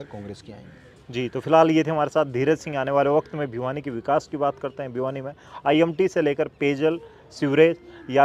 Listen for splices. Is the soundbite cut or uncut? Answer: uncut